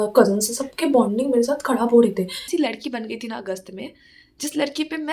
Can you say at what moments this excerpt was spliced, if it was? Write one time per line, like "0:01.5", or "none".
0:02.5